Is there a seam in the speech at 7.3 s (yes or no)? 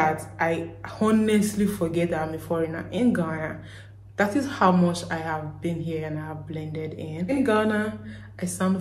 yes